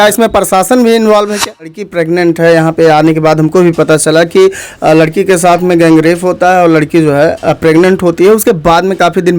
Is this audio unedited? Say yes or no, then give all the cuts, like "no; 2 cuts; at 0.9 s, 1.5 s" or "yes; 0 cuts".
no; 1 cut; at 1.8 s